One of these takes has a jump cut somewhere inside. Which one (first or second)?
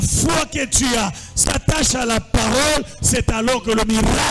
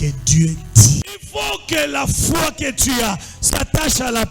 second